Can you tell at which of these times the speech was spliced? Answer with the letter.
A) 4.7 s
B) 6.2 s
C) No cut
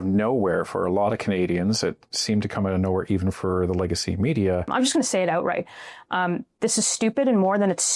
A